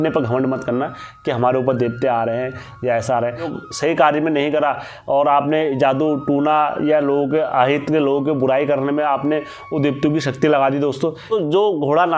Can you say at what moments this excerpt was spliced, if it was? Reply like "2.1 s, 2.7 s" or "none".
3.5 s, 11.3 s